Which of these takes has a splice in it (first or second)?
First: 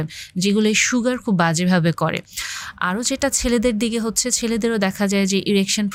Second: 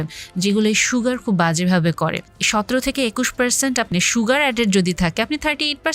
second